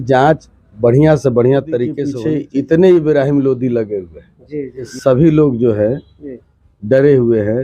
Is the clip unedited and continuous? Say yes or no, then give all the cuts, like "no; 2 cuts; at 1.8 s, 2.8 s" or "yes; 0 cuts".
no; 2 cuts; at 2.1 s, 4.9 s